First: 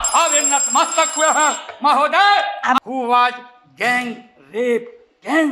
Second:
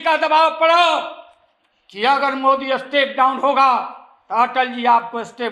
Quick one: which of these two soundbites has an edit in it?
first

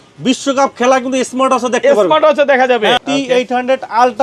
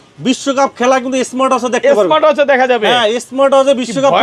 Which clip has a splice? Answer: first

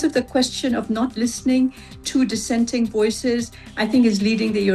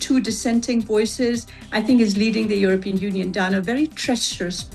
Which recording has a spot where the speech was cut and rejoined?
first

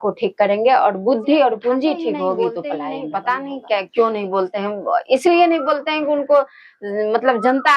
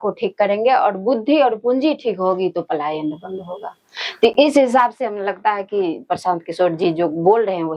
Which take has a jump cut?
first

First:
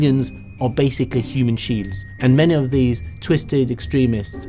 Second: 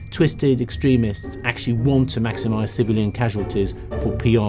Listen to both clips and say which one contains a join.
first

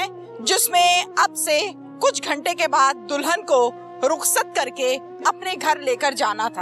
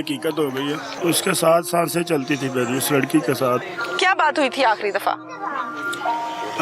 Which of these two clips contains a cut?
second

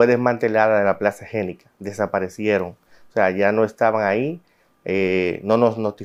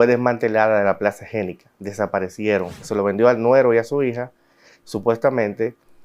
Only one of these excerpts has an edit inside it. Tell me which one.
second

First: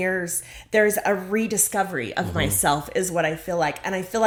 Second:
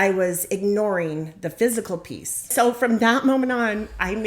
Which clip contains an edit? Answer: second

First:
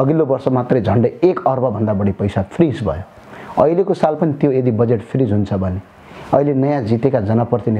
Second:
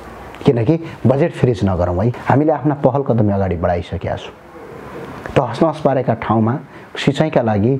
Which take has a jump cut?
second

